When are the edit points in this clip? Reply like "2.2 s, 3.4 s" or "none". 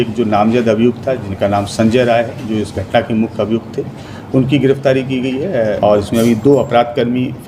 5.8 s